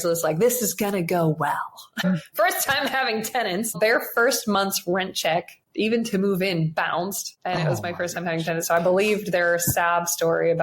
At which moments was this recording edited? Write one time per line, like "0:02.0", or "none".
0:02.0
0:03.8
0:05.6
0:07.3